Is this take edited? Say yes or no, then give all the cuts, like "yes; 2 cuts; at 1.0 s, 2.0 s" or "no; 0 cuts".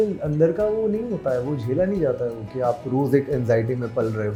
no; 0 cuts